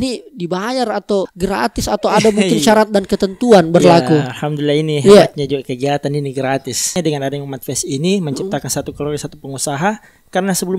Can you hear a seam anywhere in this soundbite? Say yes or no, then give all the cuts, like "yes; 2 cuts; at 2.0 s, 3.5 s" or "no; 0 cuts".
yes; 2 cuts; at 1.3 s, 6.9 s